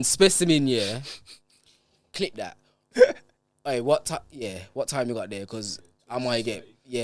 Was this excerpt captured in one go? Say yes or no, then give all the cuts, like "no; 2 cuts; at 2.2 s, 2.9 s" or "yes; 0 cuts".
yes; 0 cuts